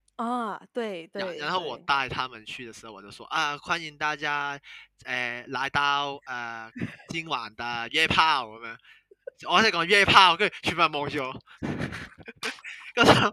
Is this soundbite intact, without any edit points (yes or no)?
no